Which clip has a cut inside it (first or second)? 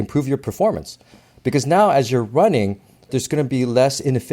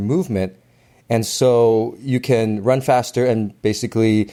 first